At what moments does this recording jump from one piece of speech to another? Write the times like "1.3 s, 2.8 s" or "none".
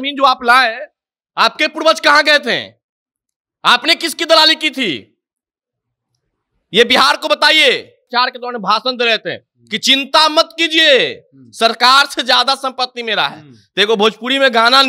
8.1 s